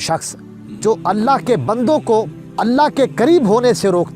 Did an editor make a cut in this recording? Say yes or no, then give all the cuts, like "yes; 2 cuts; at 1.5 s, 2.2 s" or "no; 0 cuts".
yes; 1 cut; at 2.4 s